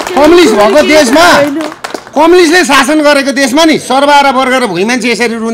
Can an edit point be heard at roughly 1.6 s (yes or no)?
no